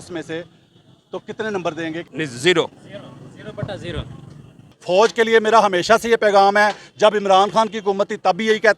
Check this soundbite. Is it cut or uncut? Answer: cut